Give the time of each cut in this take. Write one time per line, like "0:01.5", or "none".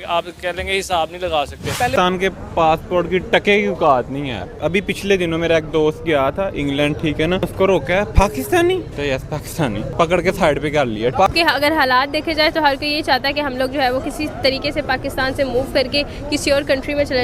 0:01.9
0:04.6
0:07.5
0:08.9
0:09.9
0:11.2